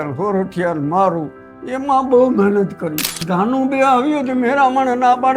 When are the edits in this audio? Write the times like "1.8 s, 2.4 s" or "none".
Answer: 3.1 s